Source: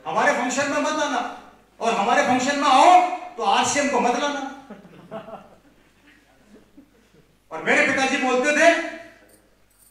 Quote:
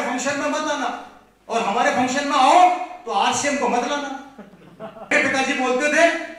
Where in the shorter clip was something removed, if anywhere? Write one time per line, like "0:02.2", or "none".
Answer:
0:05.1